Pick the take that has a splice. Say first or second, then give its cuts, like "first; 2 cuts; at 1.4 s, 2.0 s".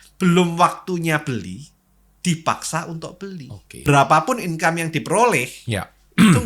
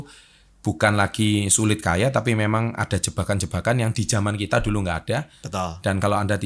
first; 1 cut; at 3.9 s